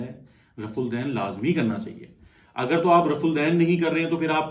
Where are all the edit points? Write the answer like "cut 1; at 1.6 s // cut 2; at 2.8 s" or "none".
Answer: none